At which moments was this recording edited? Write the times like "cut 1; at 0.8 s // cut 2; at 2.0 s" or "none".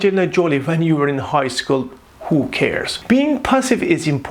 cut 1; at 3.0 s